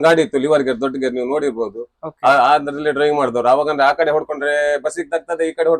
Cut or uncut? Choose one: uncut